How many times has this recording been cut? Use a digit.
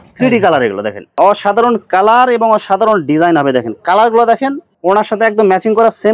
2